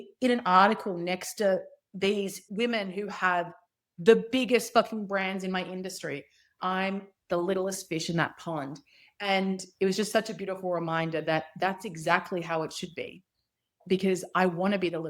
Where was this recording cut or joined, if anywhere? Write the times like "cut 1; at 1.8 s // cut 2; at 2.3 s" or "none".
cut 1; at 2.4 s

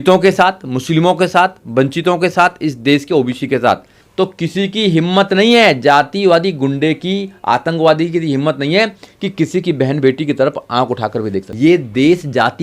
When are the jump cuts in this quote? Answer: cut 1; at 4.0 s // cut 2; at 11.5 s

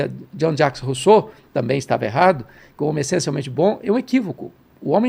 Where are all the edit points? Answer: none

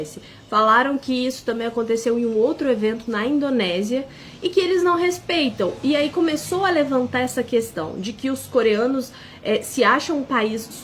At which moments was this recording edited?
none

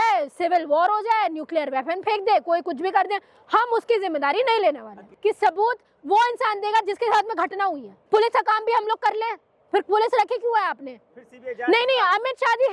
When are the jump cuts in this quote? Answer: cut 1; at 5.1 s // cut 2; at 7.9 s

